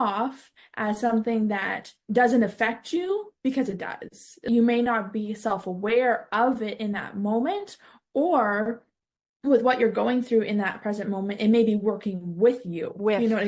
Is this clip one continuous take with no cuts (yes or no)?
no